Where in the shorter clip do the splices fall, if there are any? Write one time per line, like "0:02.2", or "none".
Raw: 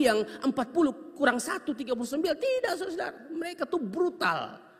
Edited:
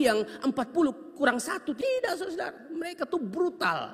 0:01.8